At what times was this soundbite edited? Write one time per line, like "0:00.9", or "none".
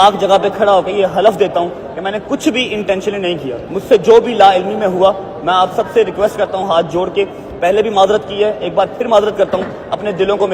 0:03.6